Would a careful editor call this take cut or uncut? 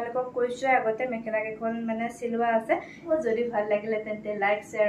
cut